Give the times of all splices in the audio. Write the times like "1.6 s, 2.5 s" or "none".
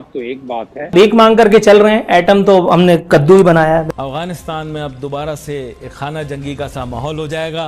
0.9 s, 3.9 s